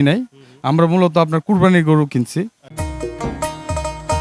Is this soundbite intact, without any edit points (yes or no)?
no